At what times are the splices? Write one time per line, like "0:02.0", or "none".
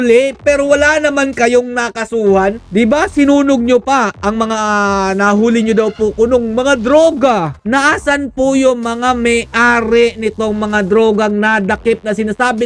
0:02.6
0:07.6